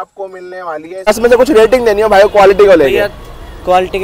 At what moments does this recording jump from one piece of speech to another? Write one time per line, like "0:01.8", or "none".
0:01.1